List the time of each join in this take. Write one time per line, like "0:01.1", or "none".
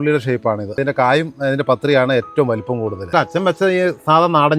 0:00.8
0:03.1